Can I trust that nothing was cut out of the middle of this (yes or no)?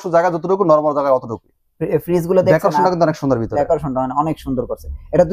yes